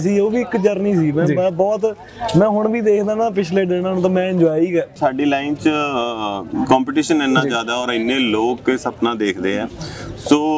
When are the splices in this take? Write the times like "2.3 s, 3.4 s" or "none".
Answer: 4.9 s